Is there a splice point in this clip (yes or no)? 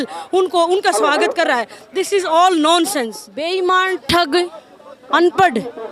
yes